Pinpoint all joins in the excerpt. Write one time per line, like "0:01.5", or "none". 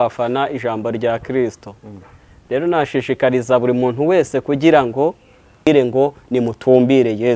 0:05.7